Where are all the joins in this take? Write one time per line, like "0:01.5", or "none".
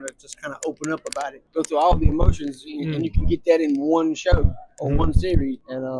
0:01.4